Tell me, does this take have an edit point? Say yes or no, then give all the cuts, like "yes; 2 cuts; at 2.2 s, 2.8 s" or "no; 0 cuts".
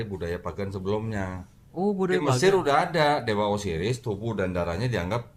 no; 0 cuts